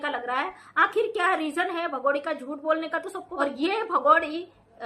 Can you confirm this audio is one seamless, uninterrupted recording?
no; 1 cut; at 3.3 s

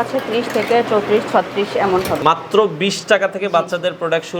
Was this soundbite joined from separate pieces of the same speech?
yes; 1 cut; at 2.2 s

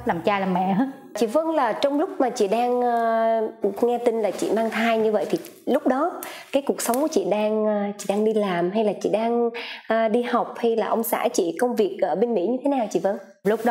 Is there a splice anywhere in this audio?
no; 0 cuts

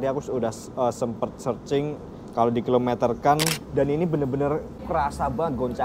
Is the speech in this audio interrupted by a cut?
yes; 2 cuts; at 3.6 s, 4.8 s

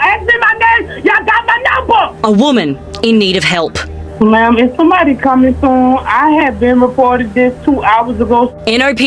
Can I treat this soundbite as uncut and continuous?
yes; 0 cuts

